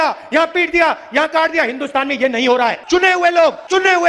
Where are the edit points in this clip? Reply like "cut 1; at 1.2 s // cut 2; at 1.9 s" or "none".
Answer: none